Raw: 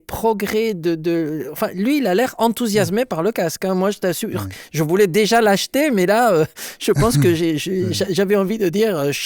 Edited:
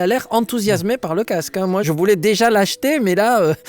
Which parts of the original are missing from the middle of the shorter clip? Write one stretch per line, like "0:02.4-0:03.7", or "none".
0:03.9-0:04.8